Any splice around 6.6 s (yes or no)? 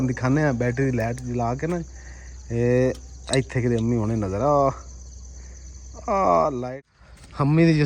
yes